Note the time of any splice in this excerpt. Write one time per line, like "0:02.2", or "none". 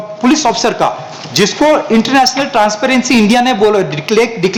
none